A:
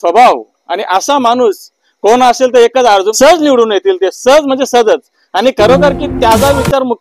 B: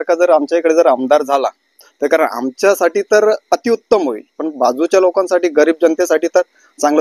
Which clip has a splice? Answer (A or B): A